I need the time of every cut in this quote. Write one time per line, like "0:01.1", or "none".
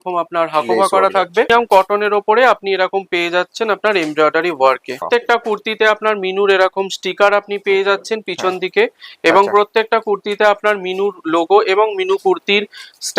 0:01.5
0:05.1